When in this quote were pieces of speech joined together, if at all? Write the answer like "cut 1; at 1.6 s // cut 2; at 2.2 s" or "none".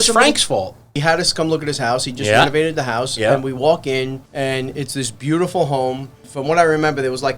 cut 1; at 0.9 s // cut 2; at 4.2 s // cut 3; at 6.3 s